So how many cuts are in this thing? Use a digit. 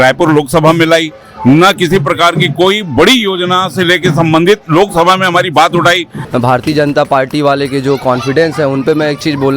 1